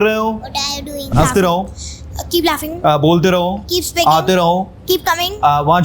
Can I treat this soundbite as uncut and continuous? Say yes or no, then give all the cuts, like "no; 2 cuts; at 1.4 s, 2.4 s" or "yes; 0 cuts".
no; 1 cut; at 1.1 s